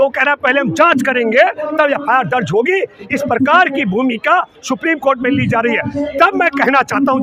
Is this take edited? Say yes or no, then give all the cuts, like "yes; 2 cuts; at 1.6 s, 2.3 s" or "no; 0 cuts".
no; 0 cuts